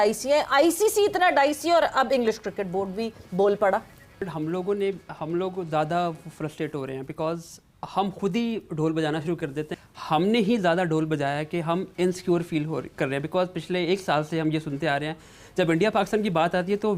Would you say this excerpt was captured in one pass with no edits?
no; 2 cuts; at 4.2 s, 9.8 s

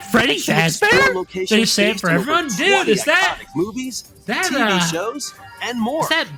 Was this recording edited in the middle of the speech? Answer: no; 0 cuts

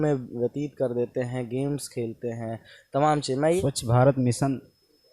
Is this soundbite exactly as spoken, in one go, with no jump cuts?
no; 1 cut; at 3.6 s

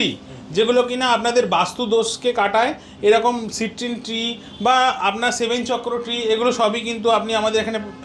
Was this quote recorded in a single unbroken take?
yes; 0 cuts

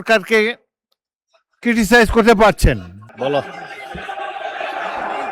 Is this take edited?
yes; 1 cut; at 3.0 s

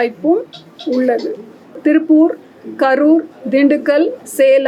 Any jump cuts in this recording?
yes; 1 cut; at 1.8 s

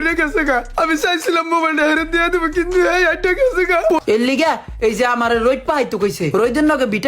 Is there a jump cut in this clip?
yes; 1 cut; at 4.0 s

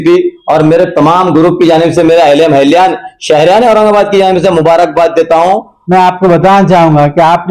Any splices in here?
yes; 1 cut; at 5.7 s

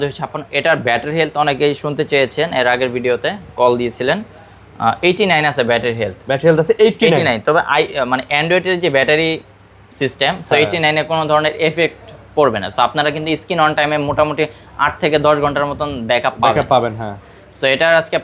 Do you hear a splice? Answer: no; 0 cuts

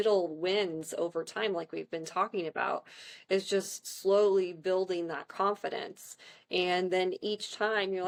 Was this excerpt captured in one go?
yes; 0 cuts

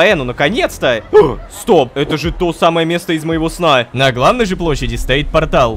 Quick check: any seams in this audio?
yes; 2 cuts; at 1.9 s, 3.9 s

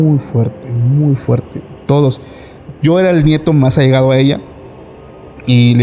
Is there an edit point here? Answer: no; 0 cuts

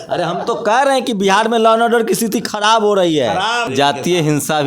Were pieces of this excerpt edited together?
yes; 1 cut; at 3.7 s

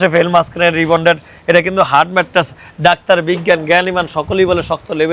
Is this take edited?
no; 0 cuts

